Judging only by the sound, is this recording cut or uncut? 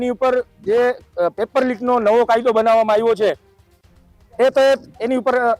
uncut